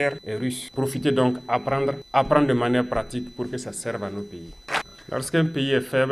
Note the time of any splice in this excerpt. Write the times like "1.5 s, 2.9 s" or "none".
4.6 s

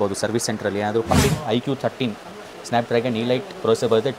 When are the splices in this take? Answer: 1.1 s

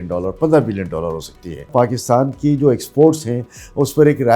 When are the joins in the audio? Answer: 1.7 s

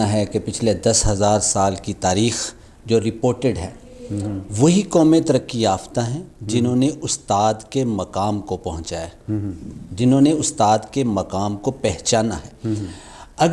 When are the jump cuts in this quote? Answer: none

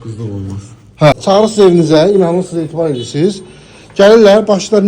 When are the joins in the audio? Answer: 1.2 s

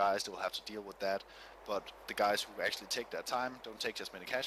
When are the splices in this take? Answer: none

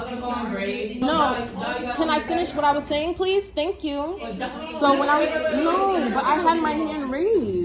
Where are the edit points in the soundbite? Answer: 1.0 s

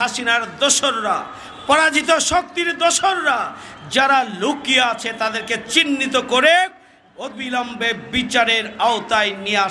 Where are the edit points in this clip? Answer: none

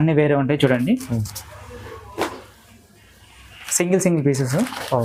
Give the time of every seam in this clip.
none

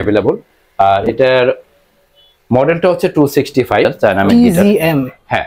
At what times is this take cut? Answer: 3.9 s

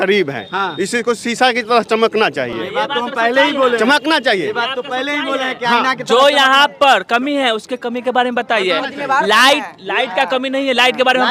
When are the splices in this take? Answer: none

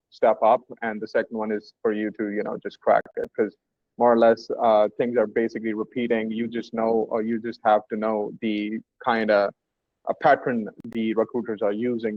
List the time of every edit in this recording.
none

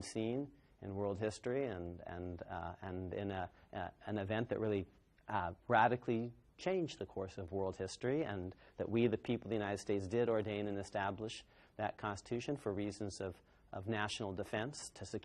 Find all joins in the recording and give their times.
2.0 s

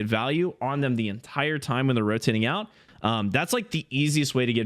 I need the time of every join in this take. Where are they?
2.8 s

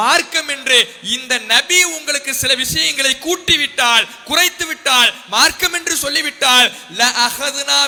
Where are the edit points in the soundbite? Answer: none

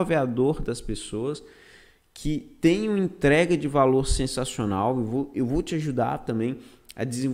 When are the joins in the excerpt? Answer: none

